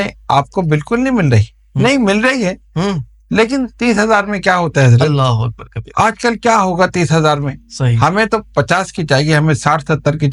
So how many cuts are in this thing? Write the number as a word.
zero